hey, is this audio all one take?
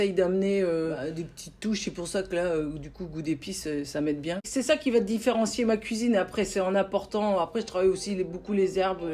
no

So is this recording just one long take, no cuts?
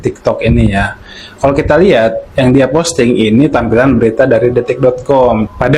yes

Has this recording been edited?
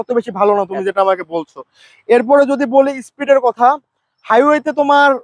no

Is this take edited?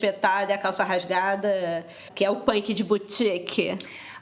yes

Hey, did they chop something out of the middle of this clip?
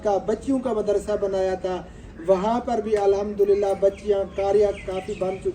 no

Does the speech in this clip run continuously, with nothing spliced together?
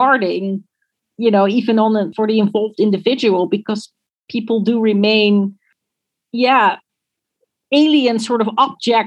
yes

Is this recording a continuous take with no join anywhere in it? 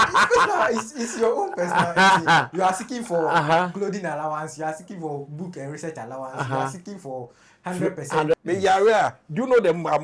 no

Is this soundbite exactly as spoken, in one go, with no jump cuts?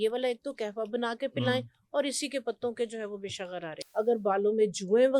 no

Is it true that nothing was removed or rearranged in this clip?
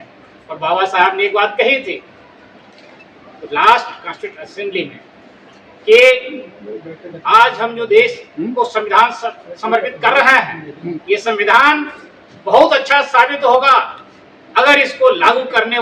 yes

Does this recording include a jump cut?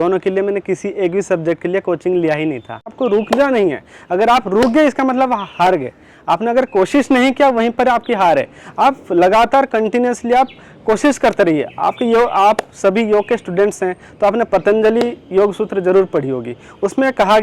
yes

